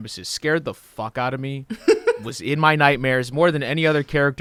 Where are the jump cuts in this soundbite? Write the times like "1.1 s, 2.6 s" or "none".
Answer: none